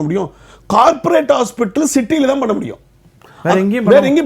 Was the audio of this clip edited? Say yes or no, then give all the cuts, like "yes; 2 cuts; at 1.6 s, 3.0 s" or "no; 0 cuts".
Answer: no; 0 cuts